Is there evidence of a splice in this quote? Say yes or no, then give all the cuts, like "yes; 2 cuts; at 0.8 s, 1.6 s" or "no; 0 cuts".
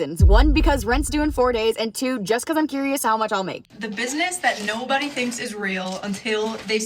yes; 1 cut; at 3.6 s